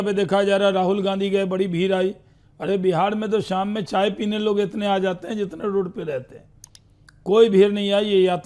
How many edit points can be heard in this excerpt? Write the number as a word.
zero